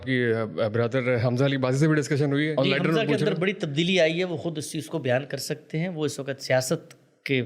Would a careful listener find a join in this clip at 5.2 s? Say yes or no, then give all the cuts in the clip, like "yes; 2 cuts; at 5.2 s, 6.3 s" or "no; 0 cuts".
no; 1 cut; at 2.5 s